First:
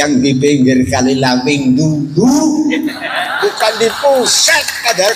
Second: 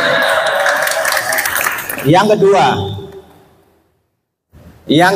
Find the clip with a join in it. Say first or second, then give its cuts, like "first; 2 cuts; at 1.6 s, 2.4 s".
second; 1 cut; at 1.5 s